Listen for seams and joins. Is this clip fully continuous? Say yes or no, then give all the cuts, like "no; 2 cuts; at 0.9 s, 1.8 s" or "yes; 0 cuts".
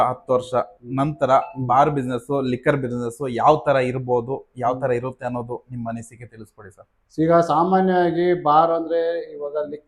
yes; 0 cuts